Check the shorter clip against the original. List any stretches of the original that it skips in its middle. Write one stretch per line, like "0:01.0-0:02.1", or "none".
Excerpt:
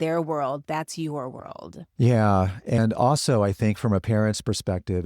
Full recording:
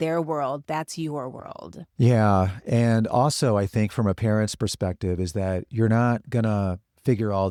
0:02.8-0:02.9